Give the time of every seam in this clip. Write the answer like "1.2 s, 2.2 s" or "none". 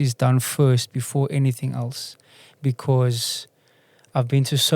none